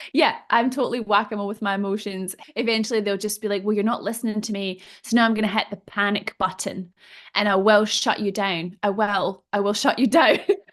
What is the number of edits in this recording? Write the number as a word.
one